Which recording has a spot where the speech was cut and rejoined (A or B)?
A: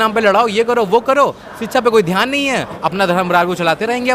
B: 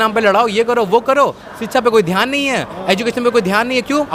A